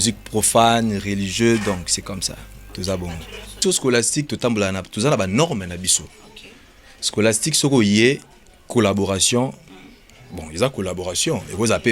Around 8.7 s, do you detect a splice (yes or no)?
no